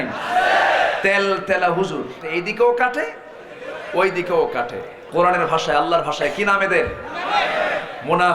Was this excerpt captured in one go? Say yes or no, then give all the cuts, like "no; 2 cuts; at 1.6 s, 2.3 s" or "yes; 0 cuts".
no; 2 cuts; at 2.3 s, 4.9 s